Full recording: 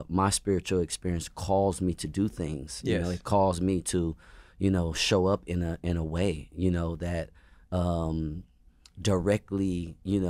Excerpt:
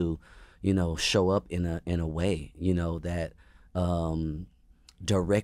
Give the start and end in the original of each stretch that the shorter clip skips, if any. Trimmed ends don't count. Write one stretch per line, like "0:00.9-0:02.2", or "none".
none